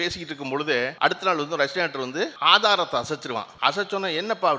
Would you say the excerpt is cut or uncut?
cut